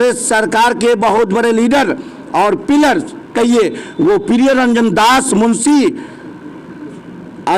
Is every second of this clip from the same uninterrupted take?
yes; 0 cuts

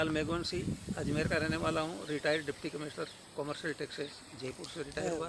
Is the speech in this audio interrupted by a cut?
no; 0 cuts

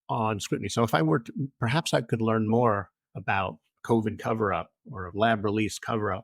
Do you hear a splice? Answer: yes; 1 cut; at 2.5 s

